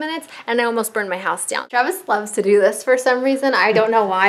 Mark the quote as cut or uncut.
cut